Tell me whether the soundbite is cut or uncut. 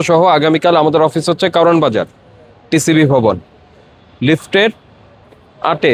uncut